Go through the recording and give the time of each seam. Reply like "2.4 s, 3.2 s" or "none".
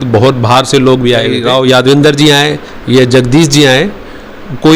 1.3 s